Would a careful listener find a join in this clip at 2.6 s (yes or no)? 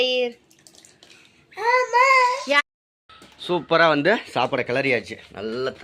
yes